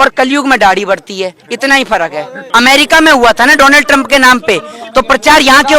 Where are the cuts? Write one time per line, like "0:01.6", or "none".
0:02.5

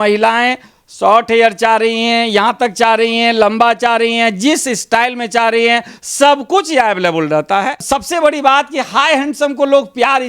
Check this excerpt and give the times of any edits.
0:07.8

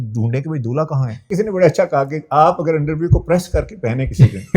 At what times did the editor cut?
0:01.3

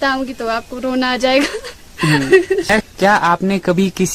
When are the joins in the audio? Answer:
0:02.7

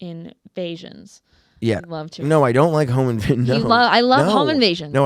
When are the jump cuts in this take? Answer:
none

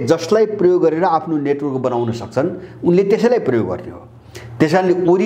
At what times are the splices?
none

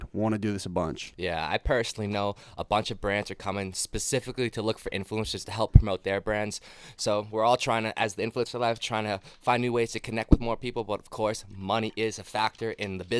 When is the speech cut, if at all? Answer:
none

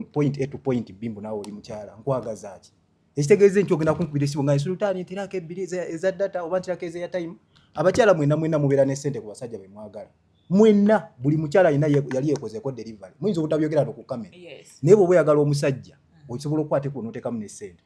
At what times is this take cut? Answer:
none

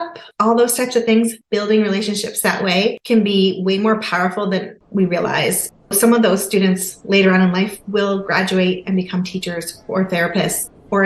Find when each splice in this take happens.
0:01.4
0:03.0
0:04.8

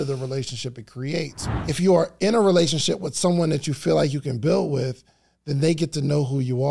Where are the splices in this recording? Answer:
0:01.4

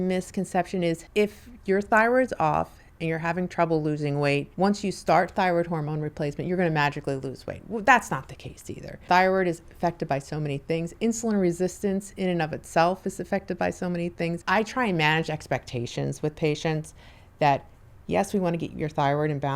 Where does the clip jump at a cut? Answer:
0:01.0
0:04.5
0:09.0
0:14.4

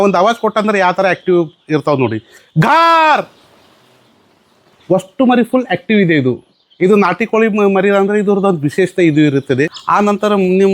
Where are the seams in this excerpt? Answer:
0:09.8

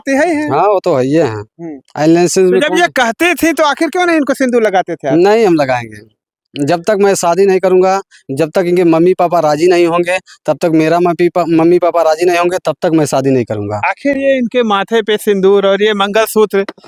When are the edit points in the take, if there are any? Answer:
none

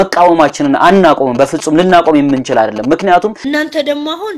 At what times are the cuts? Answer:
0:03.4

